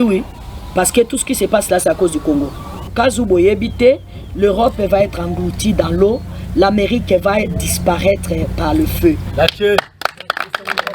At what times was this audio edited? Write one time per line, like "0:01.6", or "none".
0:02.9